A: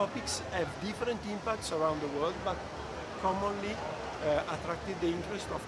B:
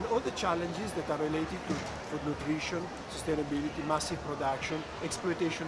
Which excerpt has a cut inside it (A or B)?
B